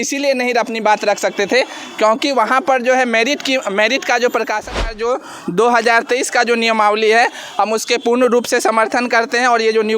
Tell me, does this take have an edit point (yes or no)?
yes